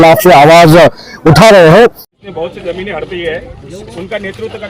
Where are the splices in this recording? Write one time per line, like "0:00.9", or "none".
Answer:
0:02.1

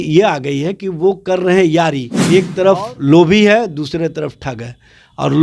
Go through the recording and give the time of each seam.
0:02.1

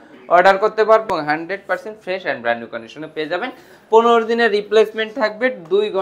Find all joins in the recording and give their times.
0:01.1

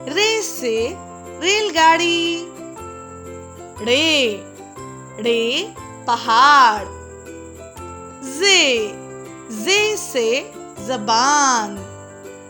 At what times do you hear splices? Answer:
none

